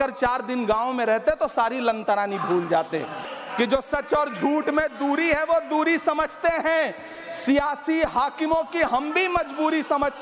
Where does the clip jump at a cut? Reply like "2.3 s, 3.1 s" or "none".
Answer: 3.2 s